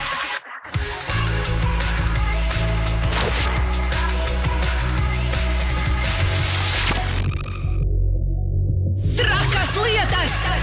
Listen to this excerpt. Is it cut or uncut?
uncut